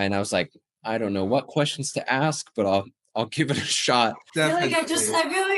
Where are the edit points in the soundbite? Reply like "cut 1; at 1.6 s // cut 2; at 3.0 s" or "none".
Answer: cut 1; at 4.2 s